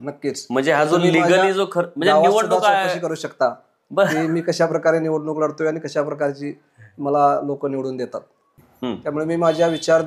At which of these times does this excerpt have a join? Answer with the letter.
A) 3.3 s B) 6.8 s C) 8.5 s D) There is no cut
C